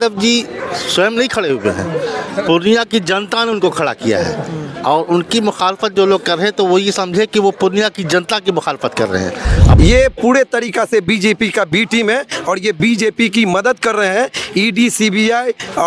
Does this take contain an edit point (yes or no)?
yes